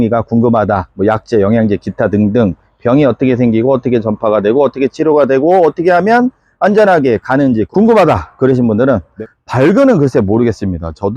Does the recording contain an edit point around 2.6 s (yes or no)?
no